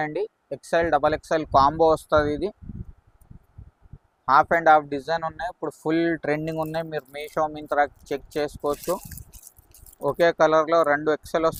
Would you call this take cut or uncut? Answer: uncut